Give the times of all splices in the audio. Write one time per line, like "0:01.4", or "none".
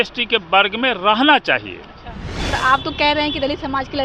0:02.5